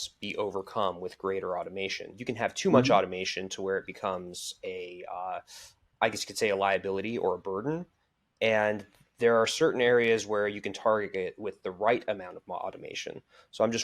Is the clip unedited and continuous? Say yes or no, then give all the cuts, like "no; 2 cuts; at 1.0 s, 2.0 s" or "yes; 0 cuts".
no; 1 cut; at 2.1 s